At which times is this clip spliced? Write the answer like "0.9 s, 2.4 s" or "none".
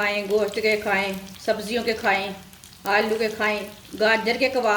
1.3 s, 3.8 s